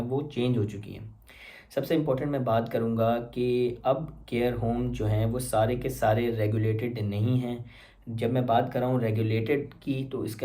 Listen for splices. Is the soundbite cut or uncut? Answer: uncut